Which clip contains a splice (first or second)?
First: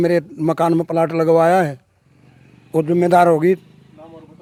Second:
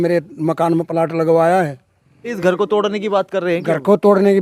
second